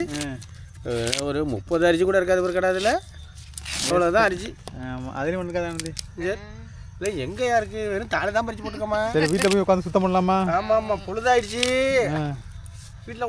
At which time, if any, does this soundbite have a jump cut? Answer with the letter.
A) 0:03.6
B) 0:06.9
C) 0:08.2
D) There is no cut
D